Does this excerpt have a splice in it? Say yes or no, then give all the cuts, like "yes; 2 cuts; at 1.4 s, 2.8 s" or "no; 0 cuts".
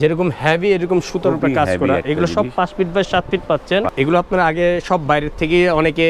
yes; 1 cut; at 3.9 s